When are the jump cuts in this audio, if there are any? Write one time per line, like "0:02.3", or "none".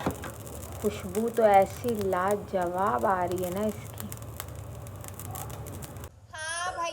0:06.0